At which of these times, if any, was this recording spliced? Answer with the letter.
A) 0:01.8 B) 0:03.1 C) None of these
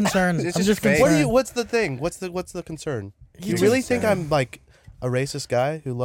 C